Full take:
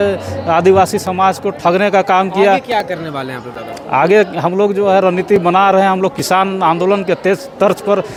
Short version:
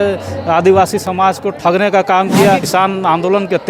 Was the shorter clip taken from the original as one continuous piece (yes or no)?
no